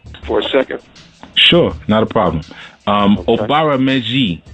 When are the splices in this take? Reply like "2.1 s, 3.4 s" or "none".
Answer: none